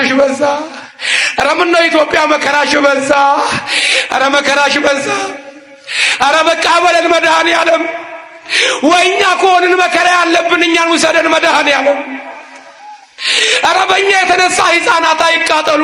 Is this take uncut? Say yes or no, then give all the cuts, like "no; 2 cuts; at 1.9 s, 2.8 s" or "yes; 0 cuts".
yes; 0 cuts